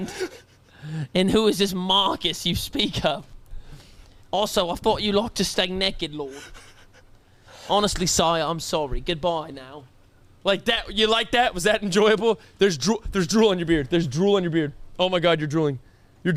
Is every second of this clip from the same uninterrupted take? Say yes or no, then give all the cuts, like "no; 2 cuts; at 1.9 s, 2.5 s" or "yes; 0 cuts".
yes; 0 cuts